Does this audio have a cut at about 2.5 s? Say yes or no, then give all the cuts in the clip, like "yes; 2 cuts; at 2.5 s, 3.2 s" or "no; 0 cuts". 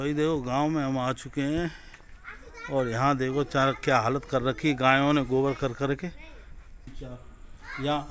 no; 1 cut; at 6.8 s